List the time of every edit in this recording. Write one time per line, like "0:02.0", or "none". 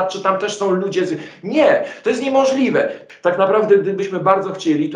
0:03.0